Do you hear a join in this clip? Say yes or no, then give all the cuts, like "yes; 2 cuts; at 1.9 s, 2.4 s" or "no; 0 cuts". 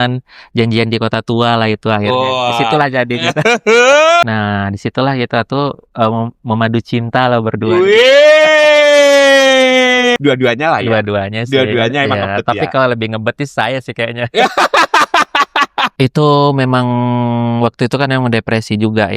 yes; 3 cuts; at 4.2 s, 10.2 s, 15.9 s